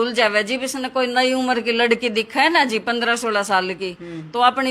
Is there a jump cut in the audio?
no; 0 cuts

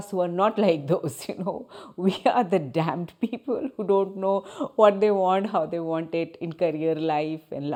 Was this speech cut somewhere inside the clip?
no; 0 cuts

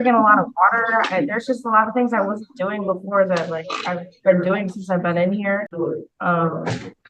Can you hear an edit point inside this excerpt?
no; 0 cuts

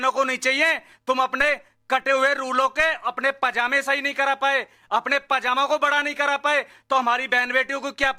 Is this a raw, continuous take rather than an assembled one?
yes; 0 cuts

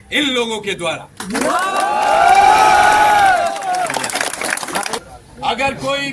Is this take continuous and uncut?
no; 1 cut; at 5.0 s

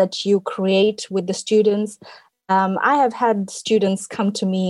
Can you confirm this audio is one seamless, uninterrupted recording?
yes; 0 cuts

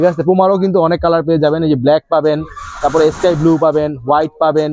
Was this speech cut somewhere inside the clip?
no; 0 cuts

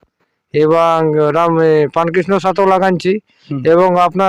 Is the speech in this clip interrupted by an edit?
no; 0 cuts

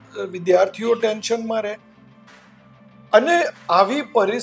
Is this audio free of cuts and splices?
yes; 0 cuts

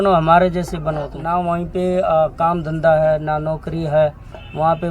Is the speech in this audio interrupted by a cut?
yes; 1 cut; at 1.2 s

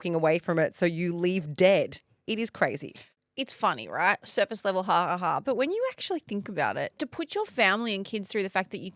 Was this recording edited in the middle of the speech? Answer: yes; 1 cut; at 7.0 s

